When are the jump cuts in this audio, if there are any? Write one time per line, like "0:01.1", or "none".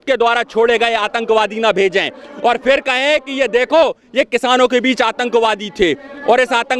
none